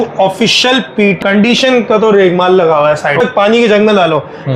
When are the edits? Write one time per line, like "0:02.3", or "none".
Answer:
0:01.2
0:03.2